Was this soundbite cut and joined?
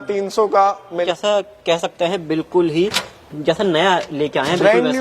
yes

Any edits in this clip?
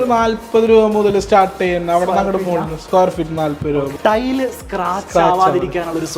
yes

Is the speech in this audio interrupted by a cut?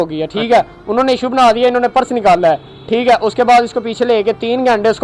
no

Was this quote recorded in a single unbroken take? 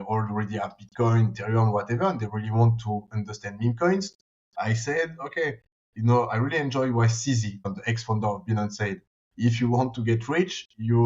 no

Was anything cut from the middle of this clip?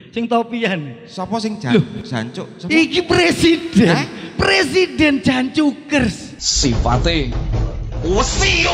yes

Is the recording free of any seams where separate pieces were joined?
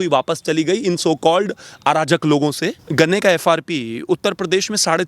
no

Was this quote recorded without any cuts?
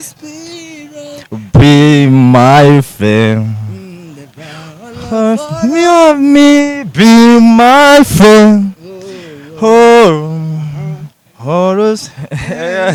yes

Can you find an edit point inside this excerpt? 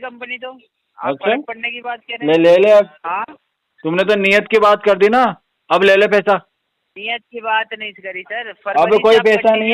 no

